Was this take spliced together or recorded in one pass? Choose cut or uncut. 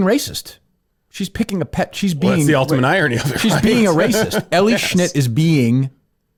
uncut